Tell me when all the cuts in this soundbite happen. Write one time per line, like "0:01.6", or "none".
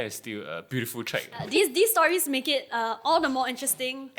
0:01.4